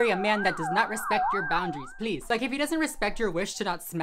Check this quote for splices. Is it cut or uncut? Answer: cut